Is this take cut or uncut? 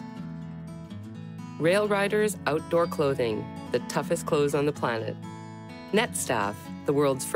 uncut